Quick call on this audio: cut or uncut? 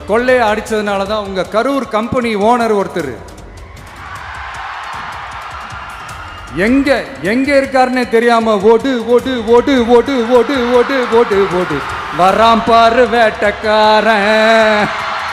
uncut